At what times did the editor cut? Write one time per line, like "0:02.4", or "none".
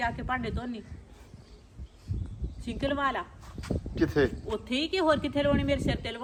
none